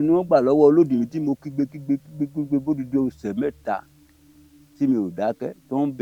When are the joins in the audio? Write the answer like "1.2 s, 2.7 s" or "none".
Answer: none

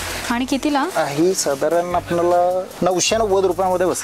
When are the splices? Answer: 2.7 s

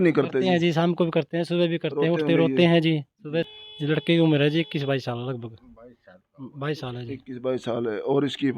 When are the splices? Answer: 3.5 s

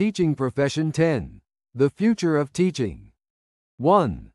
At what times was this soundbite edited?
3.3 s

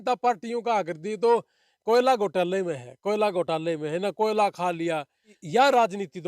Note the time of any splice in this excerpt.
5.4 s

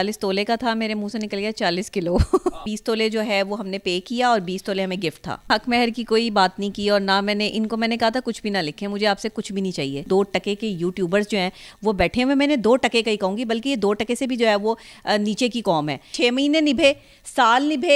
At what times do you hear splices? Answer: 2.6 s, 5.5 s, 10.0 s, 16.1 s

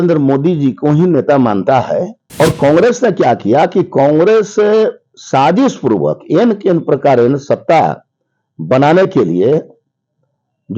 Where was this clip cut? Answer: 2.2 s

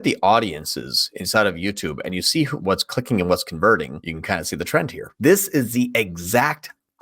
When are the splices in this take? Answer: 2.5 s, 4.1 s, 5.0 s

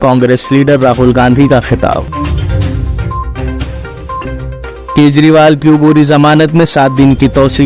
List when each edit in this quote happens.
none

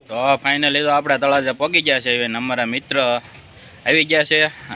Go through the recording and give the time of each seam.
none

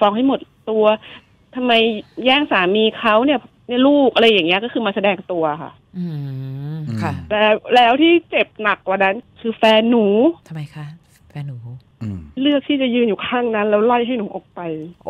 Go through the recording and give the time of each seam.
10.4 s

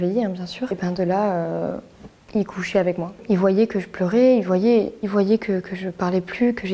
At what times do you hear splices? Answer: 0.7 s, 3.1 s

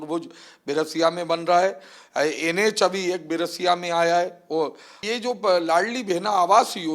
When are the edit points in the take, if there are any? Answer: 5.0 s

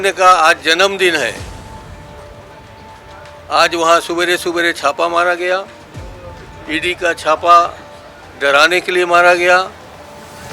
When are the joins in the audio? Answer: none

